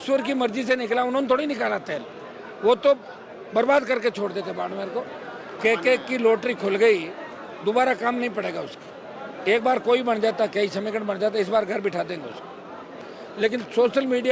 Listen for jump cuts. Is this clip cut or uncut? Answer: cut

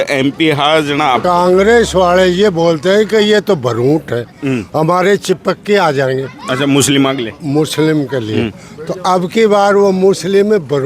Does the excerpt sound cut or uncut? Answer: cut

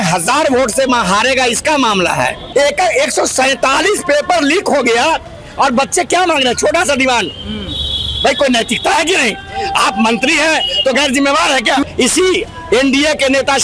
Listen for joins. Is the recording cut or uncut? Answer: cut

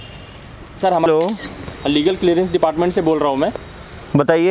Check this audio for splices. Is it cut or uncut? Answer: cut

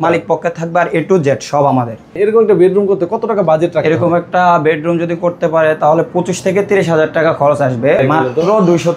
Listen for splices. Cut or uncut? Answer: cut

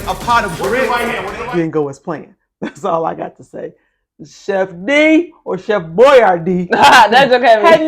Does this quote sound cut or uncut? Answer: cut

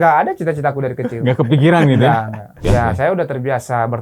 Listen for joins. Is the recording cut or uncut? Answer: cut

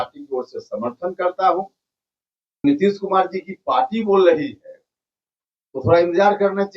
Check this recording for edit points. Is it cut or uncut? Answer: cut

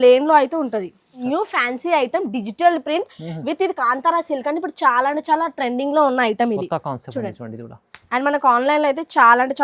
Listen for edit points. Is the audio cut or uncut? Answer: cut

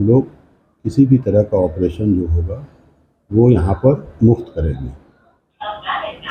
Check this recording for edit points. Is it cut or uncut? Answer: uncut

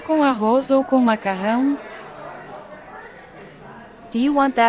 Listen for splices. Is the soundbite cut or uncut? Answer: cut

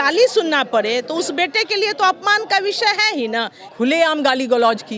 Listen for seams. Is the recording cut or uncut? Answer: cut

